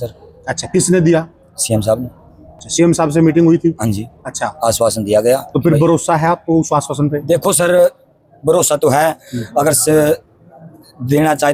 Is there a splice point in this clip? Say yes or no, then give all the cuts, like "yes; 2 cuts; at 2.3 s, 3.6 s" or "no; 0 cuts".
no; 0 cuts